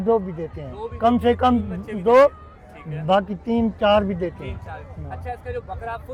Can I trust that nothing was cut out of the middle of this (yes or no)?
yes